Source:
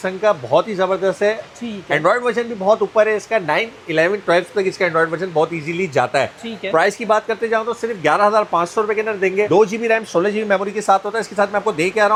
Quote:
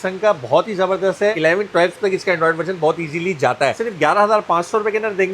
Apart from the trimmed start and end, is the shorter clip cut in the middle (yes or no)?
yes